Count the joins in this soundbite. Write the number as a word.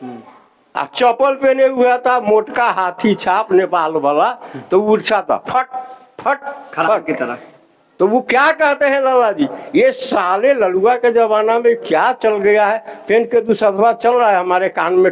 zero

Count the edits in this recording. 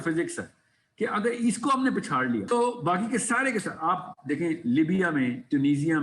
one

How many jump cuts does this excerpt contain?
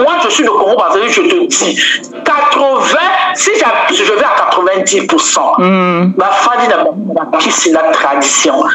zero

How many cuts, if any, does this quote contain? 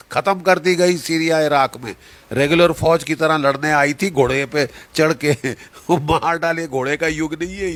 zero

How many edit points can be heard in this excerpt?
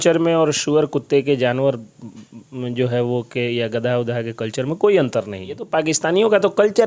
one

